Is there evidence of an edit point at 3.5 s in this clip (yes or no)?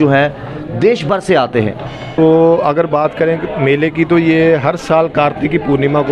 no